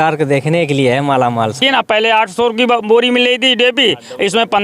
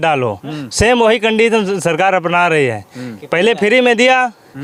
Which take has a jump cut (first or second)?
first